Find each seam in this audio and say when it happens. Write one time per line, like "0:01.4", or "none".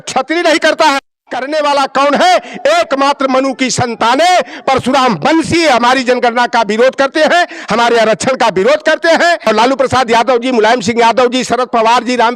0:09.4